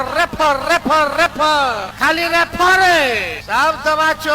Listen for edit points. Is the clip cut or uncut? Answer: cut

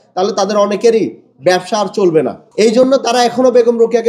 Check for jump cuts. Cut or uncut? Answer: cut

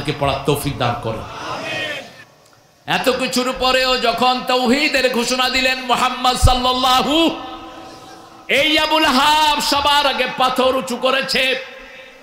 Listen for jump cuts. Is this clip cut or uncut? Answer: cut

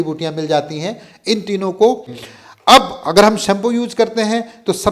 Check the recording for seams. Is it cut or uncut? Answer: cut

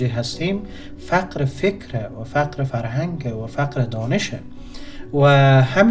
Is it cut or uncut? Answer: uncut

